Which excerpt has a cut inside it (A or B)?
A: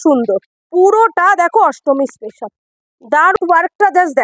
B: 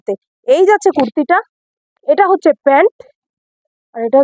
A